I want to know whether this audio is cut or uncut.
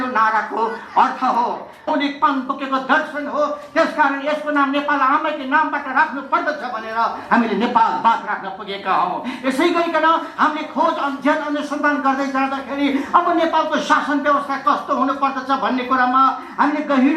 cut